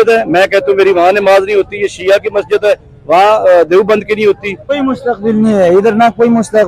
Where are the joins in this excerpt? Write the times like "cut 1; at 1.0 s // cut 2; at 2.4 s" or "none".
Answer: cut 1; at 4.6 s